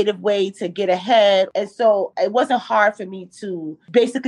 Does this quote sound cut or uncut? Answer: cut